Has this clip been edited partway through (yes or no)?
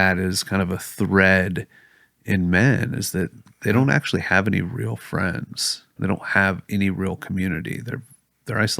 yes